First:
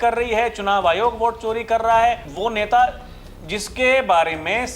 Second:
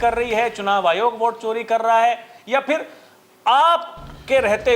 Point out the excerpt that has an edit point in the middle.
first; 1 cut; at 2.3 s

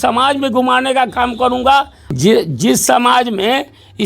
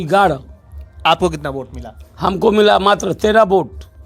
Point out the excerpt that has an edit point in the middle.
first; 1 cut; at 2.0 s

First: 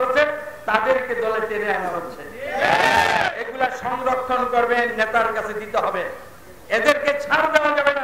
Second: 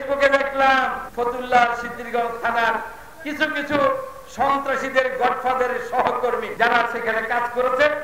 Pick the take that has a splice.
second; 2 cuts; at 1.0 s, 6.5 s

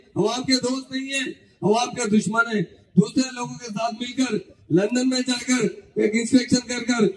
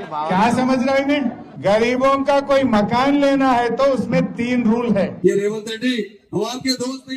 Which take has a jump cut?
second; 2 cuts; at 1.5 s, 5.1 s

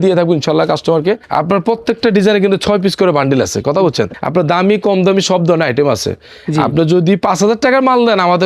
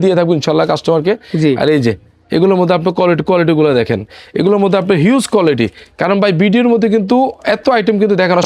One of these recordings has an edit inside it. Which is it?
first; 2 cuts; at 1.2 s, 4.1 s

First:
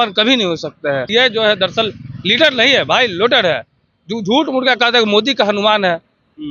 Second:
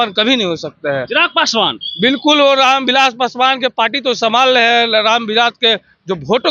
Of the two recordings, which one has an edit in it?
first; 1 cut; at 1.1 s

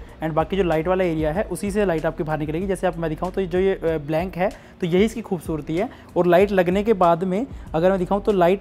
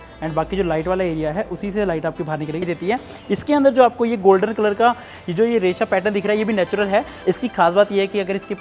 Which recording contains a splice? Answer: second; 2 cuts; at 2.6 s, 7.1 s

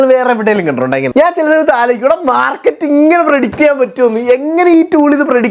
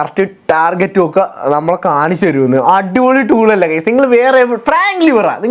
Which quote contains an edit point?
first; 1 cut; at 1.1 s

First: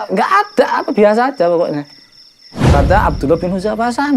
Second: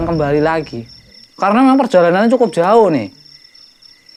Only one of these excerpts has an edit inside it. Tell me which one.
first; 1 cut; at 2.5 s

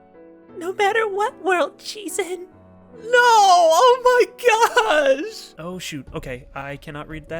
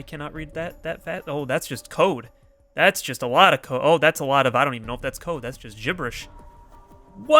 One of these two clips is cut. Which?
first; 1 cut; at 5.5 s

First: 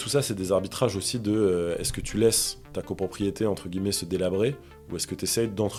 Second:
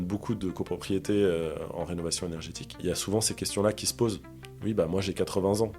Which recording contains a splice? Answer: second; 1 cut; at 2.8 s

